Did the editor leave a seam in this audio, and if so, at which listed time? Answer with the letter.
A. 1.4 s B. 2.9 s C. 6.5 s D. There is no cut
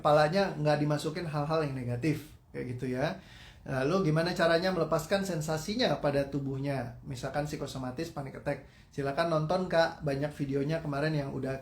B